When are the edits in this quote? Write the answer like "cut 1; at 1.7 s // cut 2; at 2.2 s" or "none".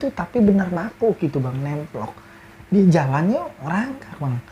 cut 1; at 2.4 s

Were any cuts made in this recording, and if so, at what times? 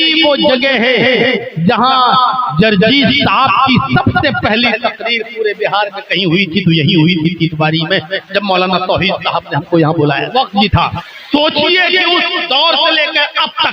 cut 1; at 10.3 s // cut 2; at 10.9 s

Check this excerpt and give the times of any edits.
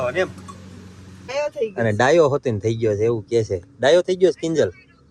cut 1; at 1.3 s

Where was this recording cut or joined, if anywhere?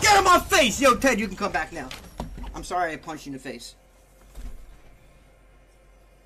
none

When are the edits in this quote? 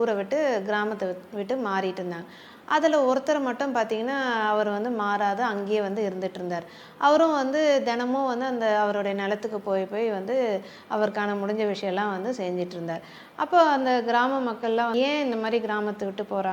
cut 1; at 14.9 s

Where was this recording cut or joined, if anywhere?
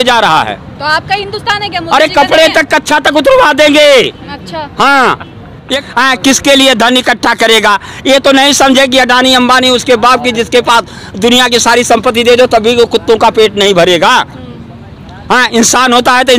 cut 1; at 5.7 s

